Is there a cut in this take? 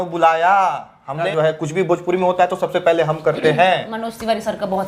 yes; 1 cut; at 1.3 s

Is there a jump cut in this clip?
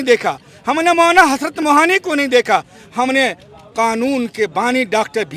no; 0 cuts

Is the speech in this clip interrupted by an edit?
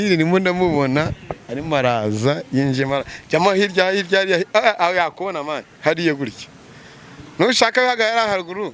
no; 0 cuts

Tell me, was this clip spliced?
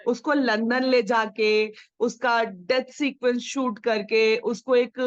no; 0 cuts

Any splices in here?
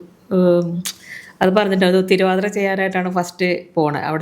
no; 0 cuts

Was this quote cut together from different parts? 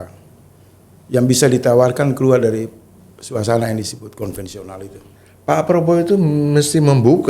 yes; 1 cut; at 5.2 s

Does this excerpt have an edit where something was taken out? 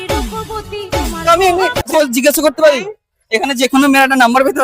yes; 1 cut; at 1.9 s

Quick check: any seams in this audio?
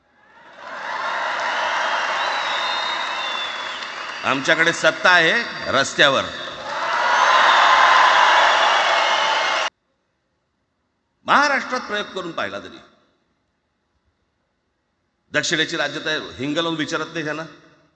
yes; 1 cut; at 9.7 s

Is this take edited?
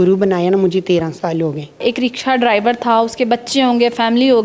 yes; 1 cut; at 1.7 s

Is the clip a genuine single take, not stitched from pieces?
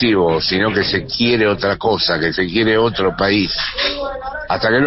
yes; 0 cuts

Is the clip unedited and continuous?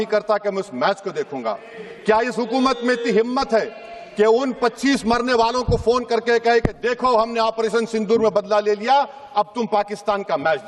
yes; 0 cuts

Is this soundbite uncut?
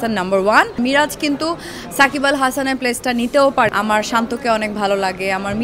no; 2 cuts; at 0.8 s, 3.7 s

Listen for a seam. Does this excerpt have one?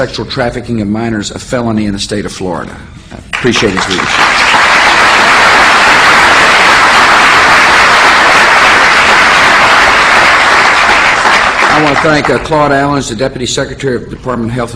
yes; 1 cut; at 11.0 s

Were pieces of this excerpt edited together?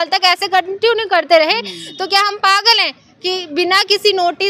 no; 0 cuts

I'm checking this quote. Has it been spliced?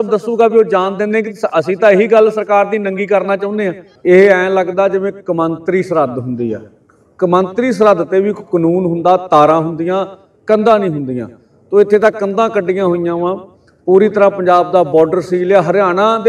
yes; 1 cut; at 3.9 s

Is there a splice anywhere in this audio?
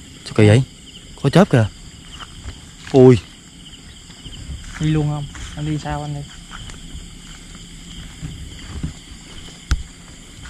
no; 0 cuts

